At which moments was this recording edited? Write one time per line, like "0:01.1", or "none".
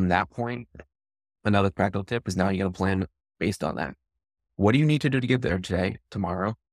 none